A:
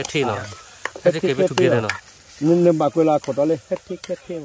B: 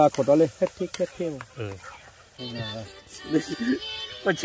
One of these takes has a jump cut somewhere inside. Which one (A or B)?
B